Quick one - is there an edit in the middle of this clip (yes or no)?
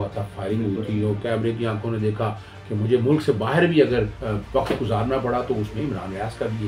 yes